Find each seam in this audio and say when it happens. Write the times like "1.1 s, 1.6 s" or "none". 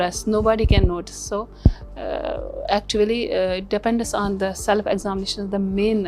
none